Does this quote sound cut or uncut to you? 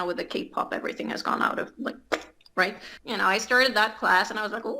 cut